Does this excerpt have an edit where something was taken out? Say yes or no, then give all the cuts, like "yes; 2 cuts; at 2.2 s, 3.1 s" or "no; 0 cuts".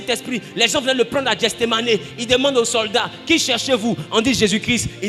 no; 0 cuts